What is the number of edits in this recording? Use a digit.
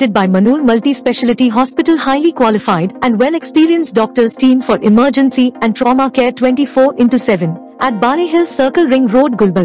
0